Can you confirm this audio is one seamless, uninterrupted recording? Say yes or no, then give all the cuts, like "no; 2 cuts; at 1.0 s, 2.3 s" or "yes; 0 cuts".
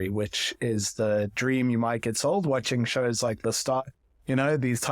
yes; 0 cuts